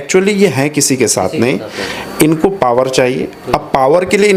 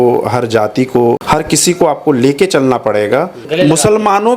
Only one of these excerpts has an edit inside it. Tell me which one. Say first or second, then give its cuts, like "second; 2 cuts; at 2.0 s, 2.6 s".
second; 2 cuts; at 1.2 s, 3.4 s